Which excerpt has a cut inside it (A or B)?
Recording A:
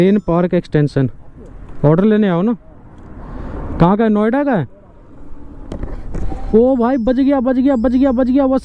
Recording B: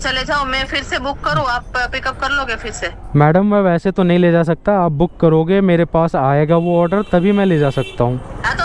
A